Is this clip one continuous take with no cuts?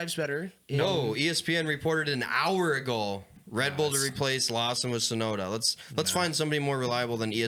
yes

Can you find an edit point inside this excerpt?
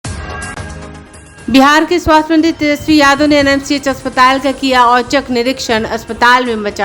yes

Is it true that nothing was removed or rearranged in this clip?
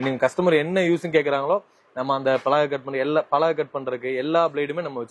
yes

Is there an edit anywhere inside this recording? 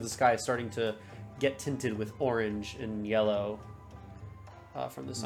no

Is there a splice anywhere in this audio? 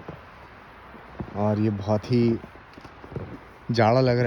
no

